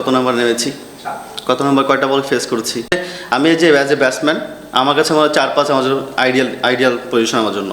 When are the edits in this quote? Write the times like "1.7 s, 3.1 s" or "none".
3.0 s